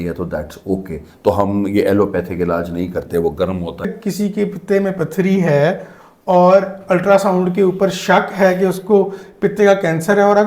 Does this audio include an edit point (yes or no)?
yes